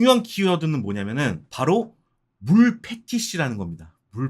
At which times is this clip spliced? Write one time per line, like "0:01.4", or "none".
0:01.5